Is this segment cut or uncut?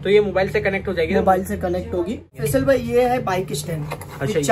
cut